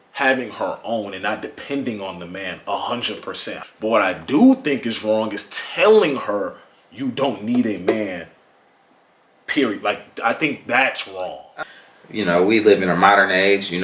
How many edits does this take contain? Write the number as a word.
two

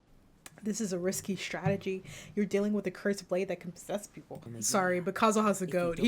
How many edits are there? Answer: one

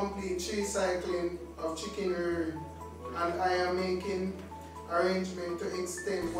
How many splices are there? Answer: zero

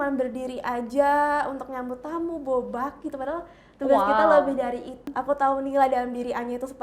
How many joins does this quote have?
one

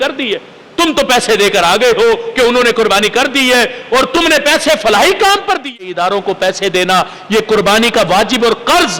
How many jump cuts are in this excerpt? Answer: one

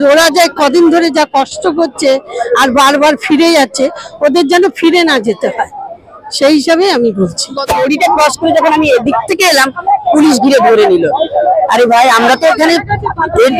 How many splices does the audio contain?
one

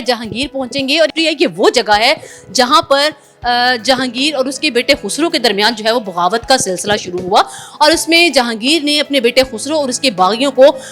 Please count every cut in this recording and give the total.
one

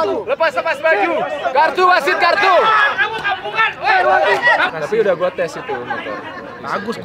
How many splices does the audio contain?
one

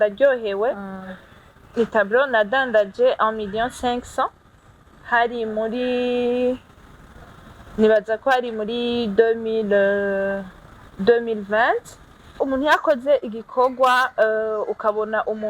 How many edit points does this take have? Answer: one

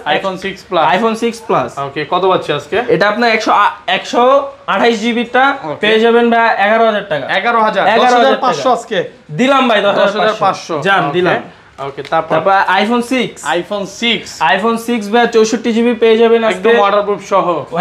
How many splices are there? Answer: zero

